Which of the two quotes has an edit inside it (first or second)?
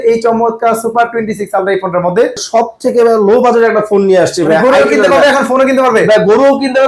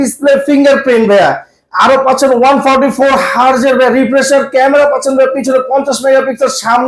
first